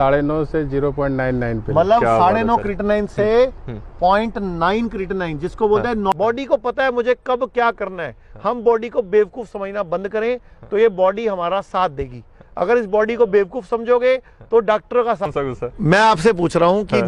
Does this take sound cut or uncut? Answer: cut